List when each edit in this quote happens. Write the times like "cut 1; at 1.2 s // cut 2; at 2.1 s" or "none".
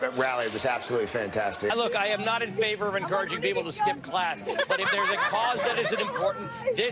none